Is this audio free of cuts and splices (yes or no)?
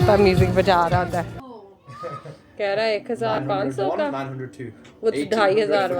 no